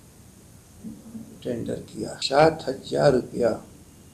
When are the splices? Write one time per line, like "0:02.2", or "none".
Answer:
0:02.2